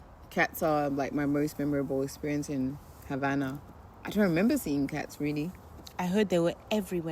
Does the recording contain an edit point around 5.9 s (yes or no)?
yes